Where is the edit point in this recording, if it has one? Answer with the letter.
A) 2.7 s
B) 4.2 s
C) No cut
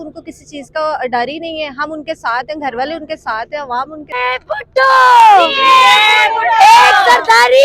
B